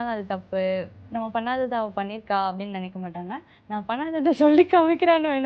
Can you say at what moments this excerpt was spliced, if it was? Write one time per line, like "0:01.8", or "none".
0:01.0
0:03.5